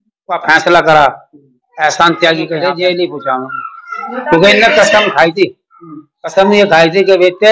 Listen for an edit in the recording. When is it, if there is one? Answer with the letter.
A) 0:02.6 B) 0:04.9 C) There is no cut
A